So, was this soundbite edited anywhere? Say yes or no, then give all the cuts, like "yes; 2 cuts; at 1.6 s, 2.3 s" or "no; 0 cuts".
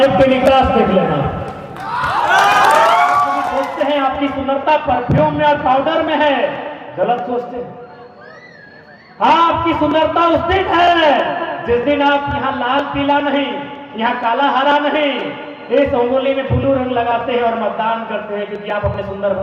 yes; 1 cut; at 3.5 s